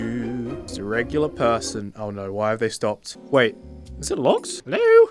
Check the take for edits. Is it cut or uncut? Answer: cut